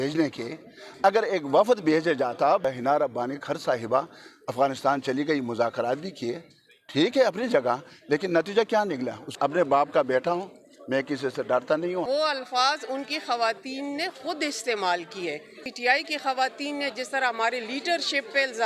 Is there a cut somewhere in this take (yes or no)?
yes